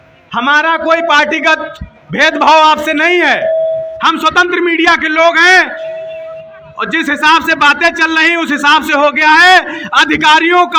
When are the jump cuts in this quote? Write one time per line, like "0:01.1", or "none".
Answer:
none